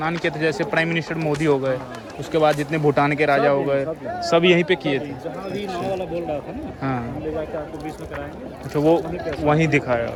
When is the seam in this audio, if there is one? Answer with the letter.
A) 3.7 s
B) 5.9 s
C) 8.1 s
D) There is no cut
D